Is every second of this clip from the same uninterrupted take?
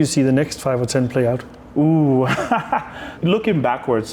yes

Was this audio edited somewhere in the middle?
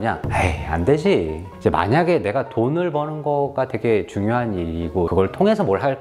yes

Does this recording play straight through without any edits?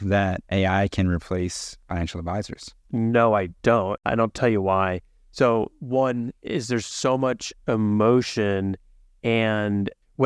no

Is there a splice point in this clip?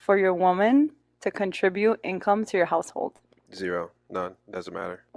no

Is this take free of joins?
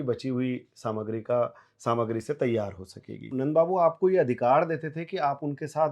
no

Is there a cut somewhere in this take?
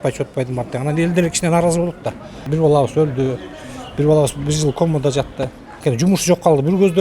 yes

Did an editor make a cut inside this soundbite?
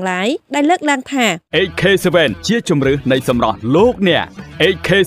yes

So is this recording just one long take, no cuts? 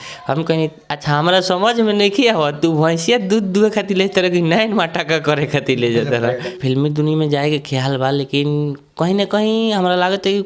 no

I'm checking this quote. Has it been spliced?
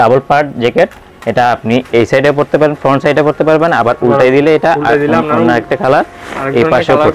no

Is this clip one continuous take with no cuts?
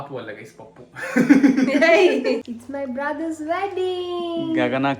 no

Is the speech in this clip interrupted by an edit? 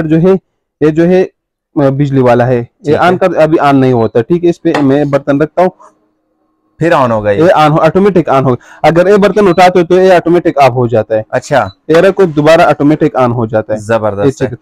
no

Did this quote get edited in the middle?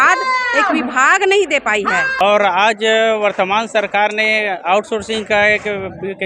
yes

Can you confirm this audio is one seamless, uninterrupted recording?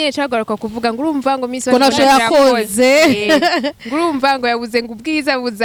yes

